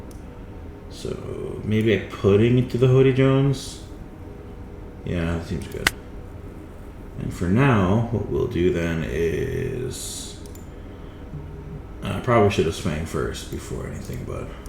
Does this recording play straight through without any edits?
yes; 0 cuts

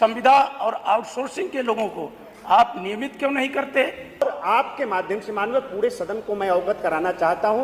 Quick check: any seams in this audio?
yes; 1 cut; at 4.2 s

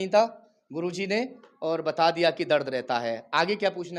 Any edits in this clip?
no; 0 cuts

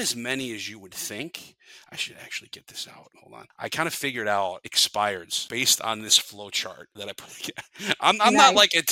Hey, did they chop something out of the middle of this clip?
yes; 4 cuts; at 3.2 s, 4.7 s, 5.4 s, 6.9 s

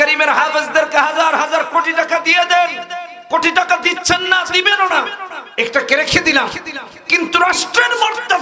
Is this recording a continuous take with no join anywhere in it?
yes; 0 cuts

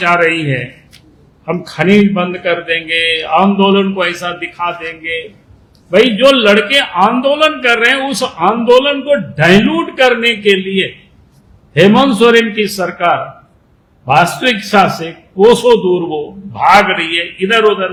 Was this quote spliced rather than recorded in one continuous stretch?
no; 0 cuts

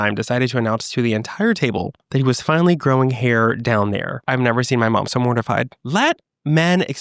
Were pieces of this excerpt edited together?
yes; 2 cuts; at 4.1 s, 5.8 s

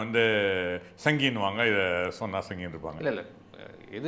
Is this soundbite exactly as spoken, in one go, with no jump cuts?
yes; 0 cuts

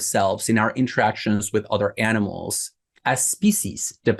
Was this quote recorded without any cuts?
yes; 0 cuts

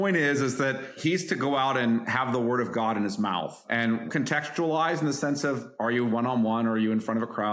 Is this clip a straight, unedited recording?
no; 3 cuts; at 0.9 s, 2.1 s, 4.0 s

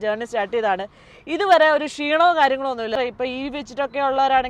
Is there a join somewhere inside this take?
yes; 1 cut; at 2.9 s

